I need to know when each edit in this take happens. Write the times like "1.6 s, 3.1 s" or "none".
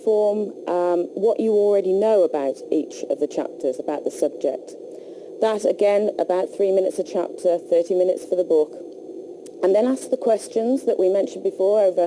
4.8 s